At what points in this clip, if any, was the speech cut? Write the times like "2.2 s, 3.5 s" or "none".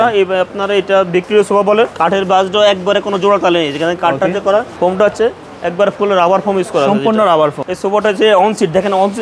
2.0 s, 4.7 s, 7.6 s